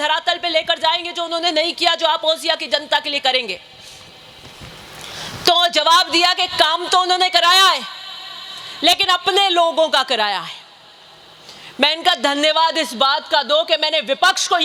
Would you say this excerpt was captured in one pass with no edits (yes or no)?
yes